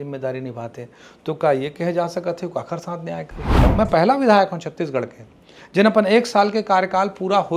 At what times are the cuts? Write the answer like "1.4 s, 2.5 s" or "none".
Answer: 3.6 s